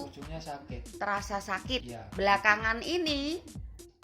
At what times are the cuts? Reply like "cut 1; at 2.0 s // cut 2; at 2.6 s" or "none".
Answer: cut 1; at 2.0 s